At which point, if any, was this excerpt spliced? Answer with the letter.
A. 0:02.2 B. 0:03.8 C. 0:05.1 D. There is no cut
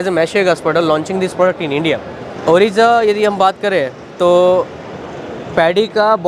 D